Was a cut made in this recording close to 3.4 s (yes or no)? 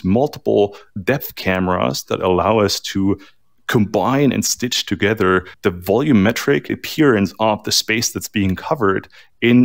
no